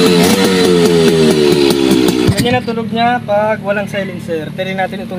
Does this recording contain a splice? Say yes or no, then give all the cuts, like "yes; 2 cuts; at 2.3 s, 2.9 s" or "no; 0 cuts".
yes; 1 cut; at 2.3 s